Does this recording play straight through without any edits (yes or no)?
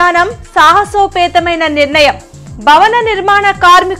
yes